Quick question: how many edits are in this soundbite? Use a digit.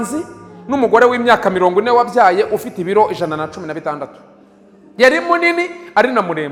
0